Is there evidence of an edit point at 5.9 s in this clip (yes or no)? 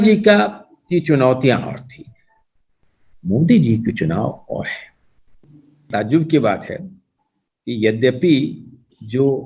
yes